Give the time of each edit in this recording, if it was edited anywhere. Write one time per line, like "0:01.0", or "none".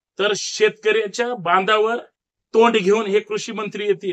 none